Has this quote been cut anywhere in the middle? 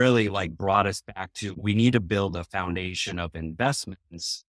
yes; 1 cut; at 1.4 s

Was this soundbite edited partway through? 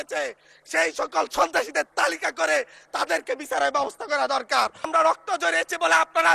yes; 1 cut; at 4.9 s

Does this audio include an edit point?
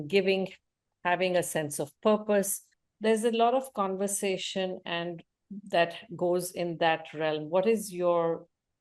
no; 0 cuts

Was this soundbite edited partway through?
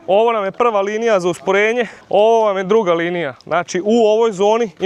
no; 0 cuts

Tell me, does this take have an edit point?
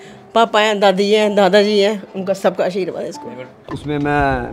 yes; 1 cut; at 3.6 s

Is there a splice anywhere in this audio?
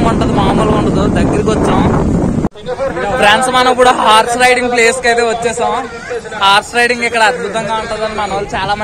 yes; 1 cut; at 2.5 s

